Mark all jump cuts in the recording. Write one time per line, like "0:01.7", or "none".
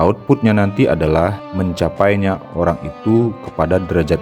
0:01.4

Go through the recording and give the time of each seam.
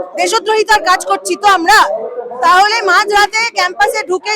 none

